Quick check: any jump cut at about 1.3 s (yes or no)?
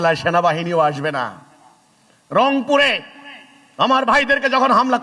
no